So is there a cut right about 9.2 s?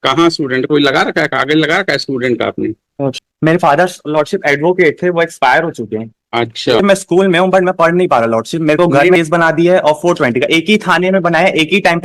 yes; 3 cuts; at 3.2 s, 6.8 s, 9.2 s

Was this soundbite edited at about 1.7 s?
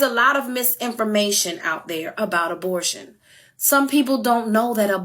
yes; 1 cut; at 1.7 s

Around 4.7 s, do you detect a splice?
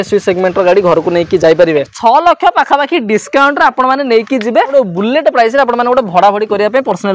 yes; 2 cuts; at 1.9 s, 4.7 s

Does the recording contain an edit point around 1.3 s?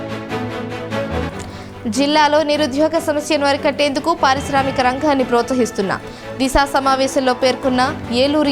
yes; 1 cut; at 1.3 s

